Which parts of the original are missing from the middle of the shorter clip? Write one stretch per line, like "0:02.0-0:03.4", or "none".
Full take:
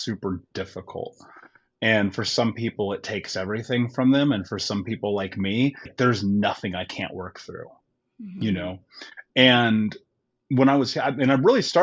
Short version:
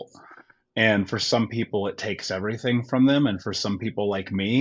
none